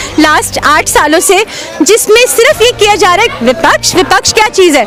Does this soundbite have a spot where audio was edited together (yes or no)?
no